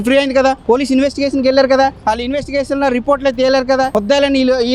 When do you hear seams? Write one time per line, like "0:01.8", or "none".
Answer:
none